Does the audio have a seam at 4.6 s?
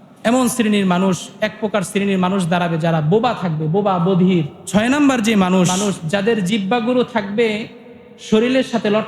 yes; 2 cuts; at 4.6 s, 5.7 s

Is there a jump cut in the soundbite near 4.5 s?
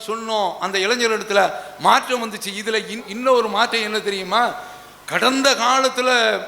no; 1 cut; at 3.1 s

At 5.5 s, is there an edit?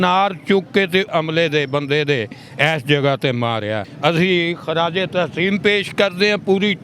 no; 2 cuts; at 1.1 s, 3.9 s

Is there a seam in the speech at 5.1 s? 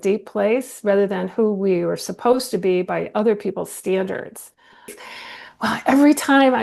yes; 1 cut; at 5.1 s

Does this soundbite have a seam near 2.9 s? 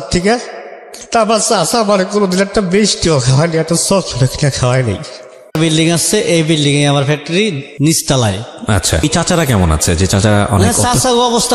no; 2 cuts; at 5.6 s, 9.0 s

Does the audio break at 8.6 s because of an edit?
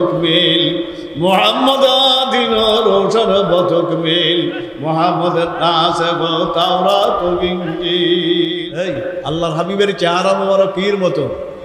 yes; 1 cut; at 8.6 s

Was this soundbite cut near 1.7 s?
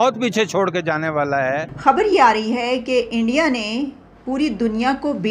yes; 1 cut; at 1.7 s

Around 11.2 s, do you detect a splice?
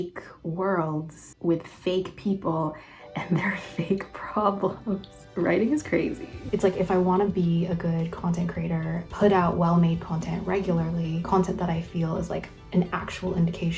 yes; 3 cuts; at 5.1 s, 6.5 s, 11.2 s

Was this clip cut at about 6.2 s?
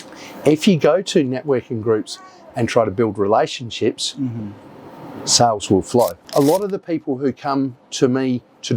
yes; 1 cut; at 6.2 s

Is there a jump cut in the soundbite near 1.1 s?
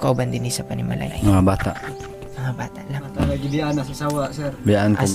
yes; 2 cuts; at 1.1 s, 3.2 s

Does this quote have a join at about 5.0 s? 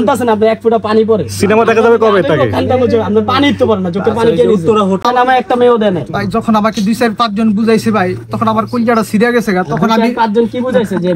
yes; 1 cut; at 5.0 s

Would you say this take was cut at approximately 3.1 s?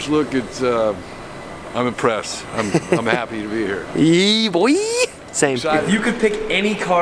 no; 1 cut; at 5.8 s

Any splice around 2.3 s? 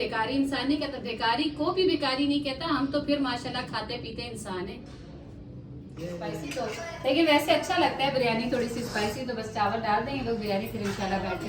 no; 1 cut; at 6.4 s

